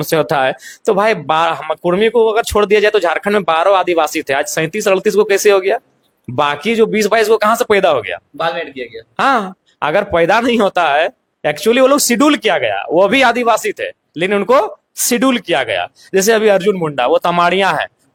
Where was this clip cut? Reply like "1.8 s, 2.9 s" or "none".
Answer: none